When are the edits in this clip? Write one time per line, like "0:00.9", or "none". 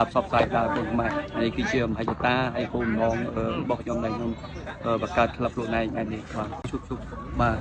0:06.7